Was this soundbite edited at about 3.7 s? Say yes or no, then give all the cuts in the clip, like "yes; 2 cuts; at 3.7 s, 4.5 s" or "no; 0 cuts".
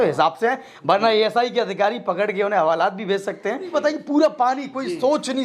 yes; 1 cut; at 3.7 s